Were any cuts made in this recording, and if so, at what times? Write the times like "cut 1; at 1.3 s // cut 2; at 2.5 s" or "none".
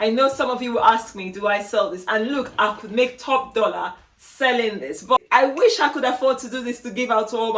cut 1; at 5.1 s